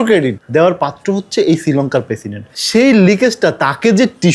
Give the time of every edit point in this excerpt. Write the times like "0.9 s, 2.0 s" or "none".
2.4 s